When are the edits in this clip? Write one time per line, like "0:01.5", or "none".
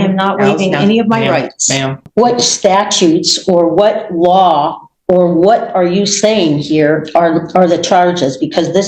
0:02.0